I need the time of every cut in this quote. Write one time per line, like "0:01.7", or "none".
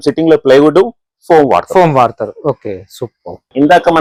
none